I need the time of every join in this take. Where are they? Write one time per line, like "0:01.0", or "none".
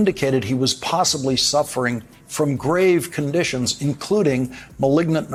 none